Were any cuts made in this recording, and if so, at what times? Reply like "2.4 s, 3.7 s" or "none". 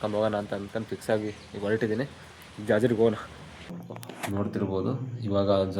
3.7 s